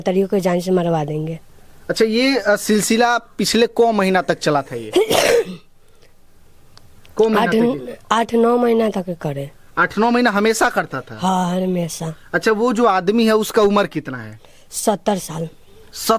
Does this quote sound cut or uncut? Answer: uncut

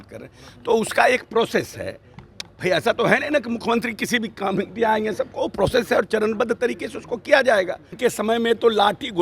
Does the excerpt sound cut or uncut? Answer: cut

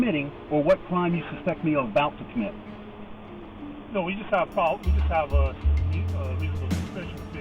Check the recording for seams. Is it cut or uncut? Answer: uncut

